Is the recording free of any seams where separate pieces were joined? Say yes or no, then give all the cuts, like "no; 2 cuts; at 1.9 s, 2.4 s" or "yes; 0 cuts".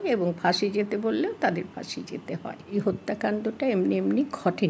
no; 1 cut; at 2.7 s